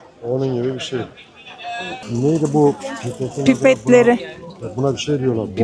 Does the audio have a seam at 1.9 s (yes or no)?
yes